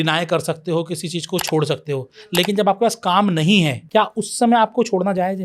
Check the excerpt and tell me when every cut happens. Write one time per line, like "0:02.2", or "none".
0:03.8

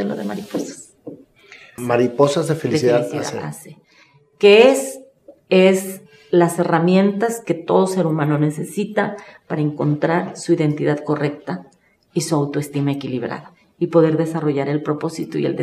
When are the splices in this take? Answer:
0:01.7

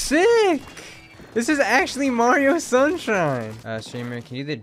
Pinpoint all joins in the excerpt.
0:03.6

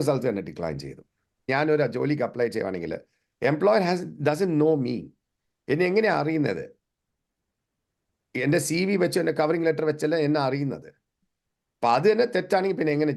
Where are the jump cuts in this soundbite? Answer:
0:01.5

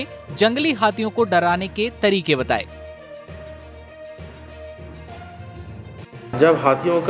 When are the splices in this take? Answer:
none

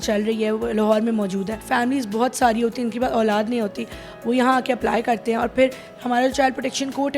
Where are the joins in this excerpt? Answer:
0:01.6

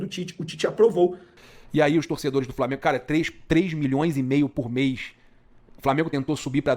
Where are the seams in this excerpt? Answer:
0:01.3

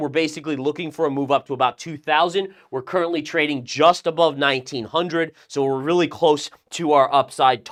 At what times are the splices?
none

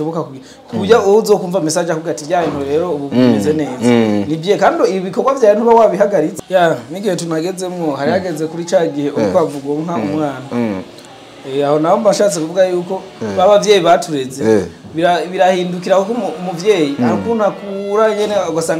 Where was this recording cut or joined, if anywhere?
0:06.3

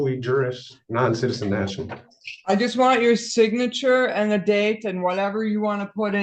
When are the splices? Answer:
none

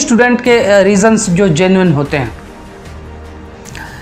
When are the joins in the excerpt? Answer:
none

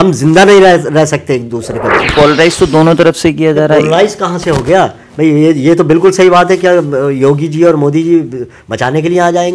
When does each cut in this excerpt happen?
0:02.0

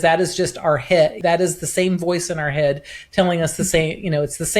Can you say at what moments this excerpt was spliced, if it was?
0:01.2

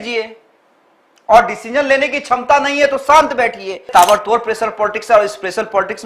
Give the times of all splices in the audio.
0:03.9

